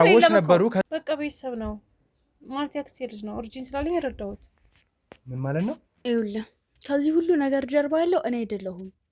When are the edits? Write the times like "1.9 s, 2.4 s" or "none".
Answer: 0.8 s, 5.9 s